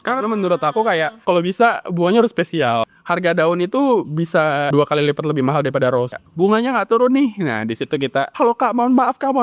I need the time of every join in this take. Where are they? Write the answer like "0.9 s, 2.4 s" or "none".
1.2 s, 2.9 s, 4.7 s, 6.2 s, 8.3 s